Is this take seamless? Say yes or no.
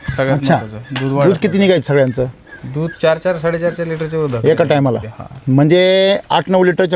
yes